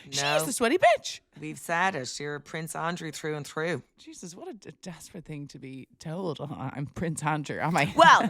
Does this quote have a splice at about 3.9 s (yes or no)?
yes